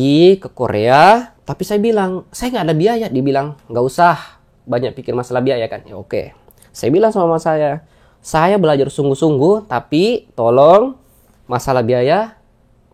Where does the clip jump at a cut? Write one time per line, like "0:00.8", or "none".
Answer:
0:01.4